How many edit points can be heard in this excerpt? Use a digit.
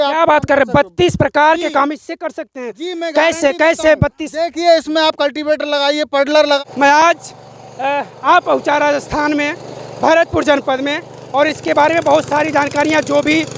1